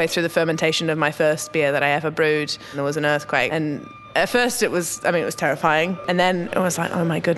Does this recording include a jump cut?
yes; 2 cuts; at 2.7 s, 6.0 s

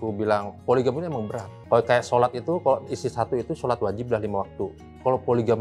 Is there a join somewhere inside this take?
yes; 1 cut; at 1.5 s

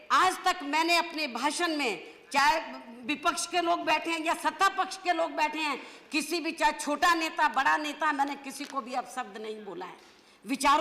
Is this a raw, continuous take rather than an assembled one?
yes; 0 cuts

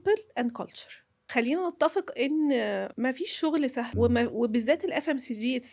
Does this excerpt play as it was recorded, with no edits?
no; 3 cuts; at 1.3 s, 2.9 s, 3.9 s

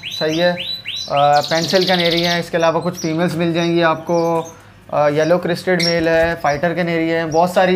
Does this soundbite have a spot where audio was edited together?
no; 0 cuts

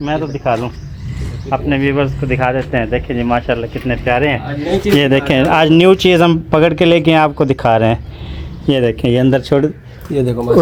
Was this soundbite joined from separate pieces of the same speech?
no; 0 cuts

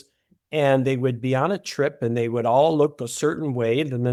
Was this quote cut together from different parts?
no; 0 cuts

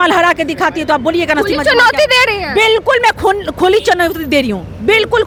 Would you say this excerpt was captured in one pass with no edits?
yes; 0 cuts

